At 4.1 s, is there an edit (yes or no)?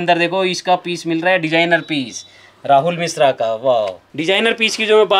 yes